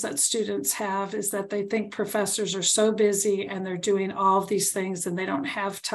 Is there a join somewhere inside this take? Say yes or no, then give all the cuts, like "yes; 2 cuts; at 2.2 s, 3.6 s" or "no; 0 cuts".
no; 0 cuts